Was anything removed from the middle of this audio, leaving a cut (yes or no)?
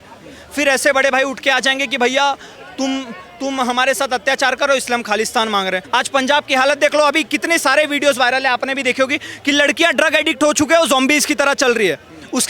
yes